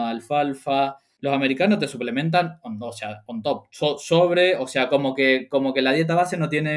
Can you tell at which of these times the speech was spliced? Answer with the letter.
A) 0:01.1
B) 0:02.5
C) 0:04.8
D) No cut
A